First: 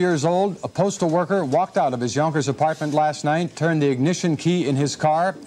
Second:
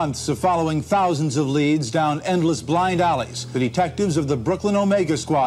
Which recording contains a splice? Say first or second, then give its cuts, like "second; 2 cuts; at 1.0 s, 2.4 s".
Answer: second; 1 cut; at 3.4 s